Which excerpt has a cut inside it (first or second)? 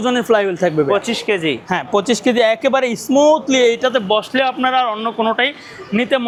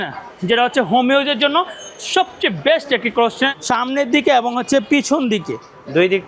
second